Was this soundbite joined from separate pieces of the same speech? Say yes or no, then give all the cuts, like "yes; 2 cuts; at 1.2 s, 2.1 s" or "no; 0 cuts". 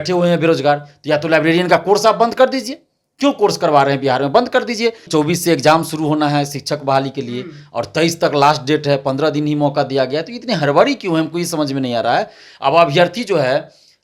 yes; 1 cut; at 5.1 s